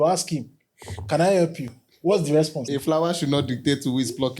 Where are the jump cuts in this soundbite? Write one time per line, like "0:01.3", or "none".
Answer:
0:02.6